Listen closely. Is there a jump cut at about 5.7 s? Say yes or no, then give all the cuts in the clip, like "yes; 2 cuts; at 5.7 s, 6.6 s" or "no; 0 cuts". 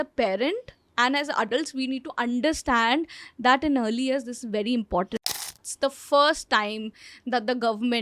yes; 1 cut; at 5.7 s